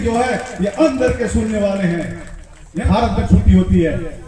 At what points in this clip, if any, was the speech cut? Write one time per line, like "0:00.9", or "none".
0:02.9